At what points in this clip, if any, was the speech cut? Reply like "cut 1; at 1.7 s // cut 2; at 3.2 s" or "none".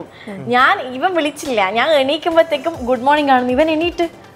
none